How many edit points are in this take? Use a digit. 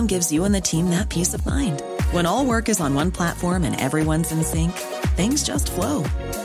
0